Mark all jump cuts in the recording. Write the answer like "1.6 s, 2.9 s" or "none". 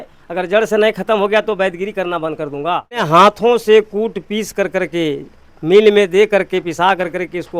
3.0 s